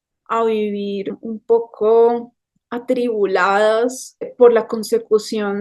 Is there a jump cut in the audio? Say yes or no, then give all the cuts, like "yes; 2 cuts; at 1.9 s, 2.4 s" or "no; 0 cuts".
yes; 2 cuts; at 1.2 s, 4.3 s